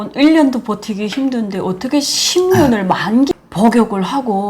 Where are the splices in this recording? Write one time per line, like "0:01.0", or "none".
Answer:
0:03.3